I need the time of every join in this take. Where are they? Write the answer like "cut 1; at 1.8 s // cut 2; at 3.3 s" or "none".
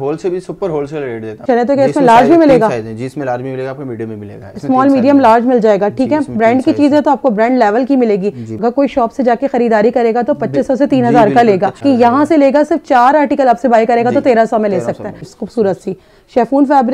cut 1; at 1.4 s // cut 2; at 8.5 s // cut 3; at 11.8 s // cut 4; at 15.4 s